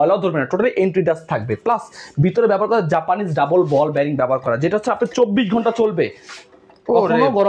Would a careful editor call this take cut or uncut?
uncut